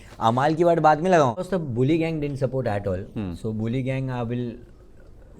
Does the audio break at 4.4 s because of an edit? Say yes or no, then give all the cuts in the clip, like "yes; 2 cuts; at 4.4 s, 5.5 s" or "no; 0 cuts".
no; 1 cut; at 1.4 s